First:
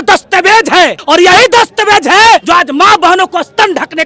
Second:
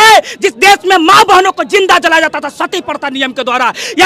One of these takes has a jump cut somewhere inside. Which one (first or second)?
first